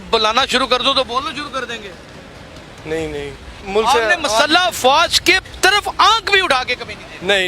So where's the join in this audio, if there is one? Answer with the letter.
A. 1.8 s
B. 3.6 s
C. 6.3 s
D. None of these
B